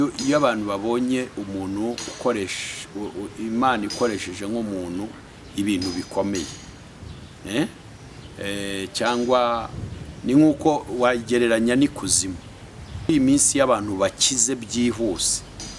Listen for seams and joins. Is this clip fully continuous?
no; 1 cut; at 13.1 s

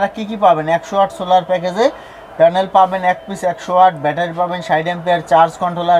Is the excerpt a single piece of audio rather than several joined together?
yes; 0 cuts

